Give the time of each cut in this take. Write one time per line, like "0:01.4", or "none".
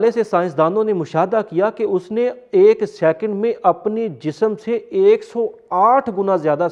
none